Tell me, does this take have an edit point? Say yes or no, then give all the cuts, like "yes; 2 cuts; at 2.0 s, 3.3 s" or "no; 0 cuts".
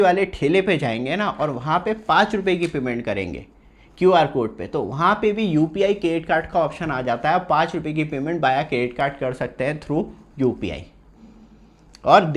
no; 0 cuts